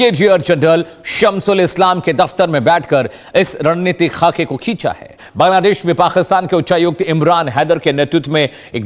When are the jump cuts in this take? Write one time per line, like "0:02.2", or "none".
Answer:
0:05.2